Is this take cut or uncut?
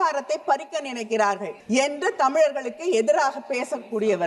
cut